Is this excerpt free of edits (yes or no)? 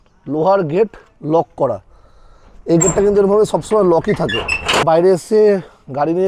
no